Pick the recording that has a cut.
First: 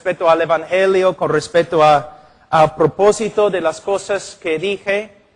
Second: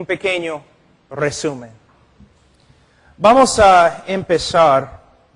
second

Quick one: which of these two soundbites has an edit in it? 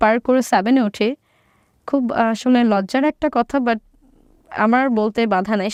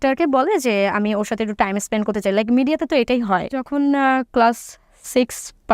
second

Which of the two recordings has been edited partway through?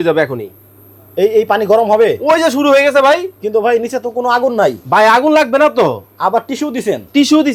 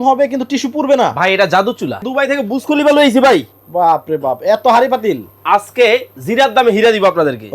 second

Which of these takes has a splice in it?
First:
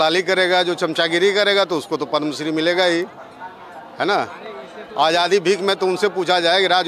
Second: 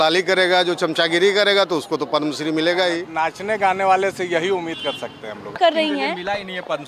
second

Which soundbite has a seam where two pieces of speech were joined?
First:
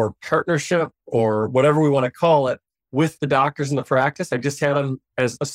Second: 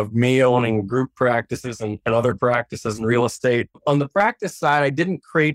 second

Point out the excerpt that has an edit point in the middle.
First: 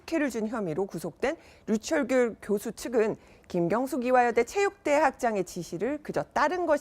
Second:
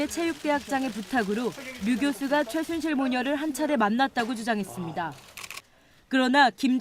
first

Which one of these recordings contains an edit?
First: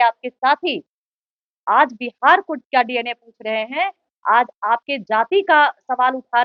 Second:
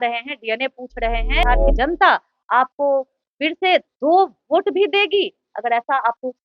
second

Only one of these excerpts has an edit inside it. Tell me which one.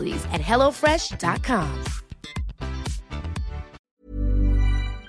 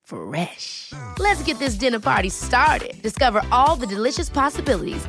first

